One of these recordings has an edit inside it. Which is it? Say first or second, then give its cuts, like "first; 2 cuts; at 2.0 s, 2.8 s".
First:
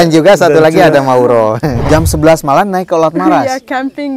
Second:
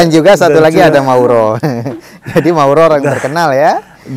first; 1 cut; at 1.7 s